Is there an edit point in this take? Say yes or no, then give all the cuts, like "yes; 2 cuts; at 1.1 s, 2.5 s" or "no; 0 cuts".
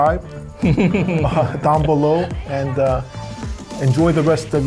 no; 0 cuts